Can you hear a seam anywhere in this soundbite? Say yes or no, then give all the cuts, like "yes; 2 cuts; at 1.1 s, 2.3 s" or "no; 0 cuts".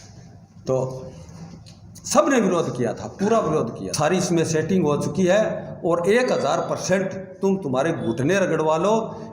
yes; 1 cut; at 3.8 s